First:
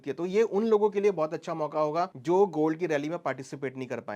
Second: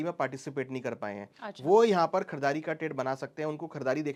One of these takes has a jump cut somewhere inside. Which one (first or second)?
first